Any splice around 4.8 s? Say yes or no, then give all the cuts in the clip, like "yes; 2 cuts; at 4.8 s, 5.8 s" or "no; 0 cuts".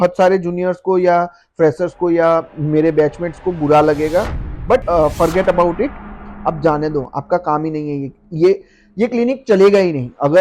yes; 1 cut; at 4.8 s